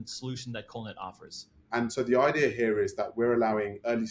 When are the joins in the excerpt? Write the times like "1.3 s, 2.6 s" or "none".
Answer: 1.6 s